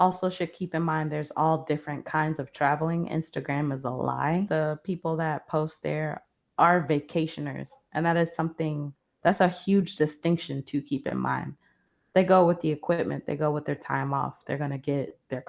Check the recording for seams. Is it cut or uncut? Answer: uncut